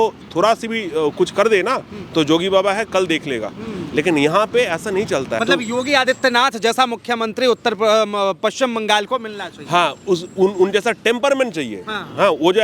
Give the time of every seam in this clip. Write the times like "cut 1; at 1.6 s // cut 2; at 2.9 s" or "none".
cut 1; at 5.4 s